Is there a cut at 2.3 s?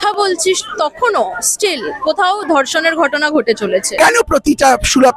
no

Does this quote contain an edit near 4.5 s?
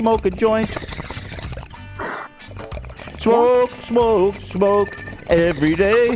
no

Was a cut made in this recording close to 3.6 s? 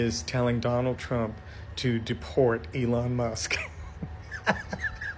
no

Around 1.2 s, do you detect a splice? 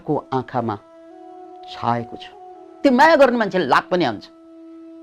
no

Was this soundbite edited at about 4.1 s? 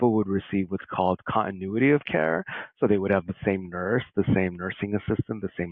no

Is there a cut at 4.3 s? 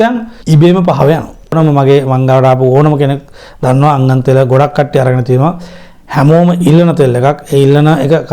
no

